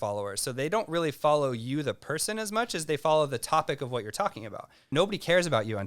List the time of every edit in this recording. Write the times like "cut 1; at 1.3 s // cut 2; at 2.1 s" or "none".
cut 1; at 4.9 s